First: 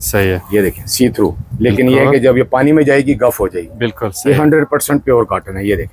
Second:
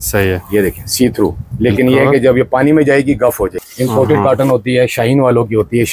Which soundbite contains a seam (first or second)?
second